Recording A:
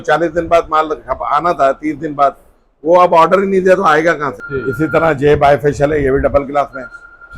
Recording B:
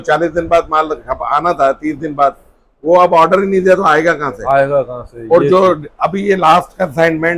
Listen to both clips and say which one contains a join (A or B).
A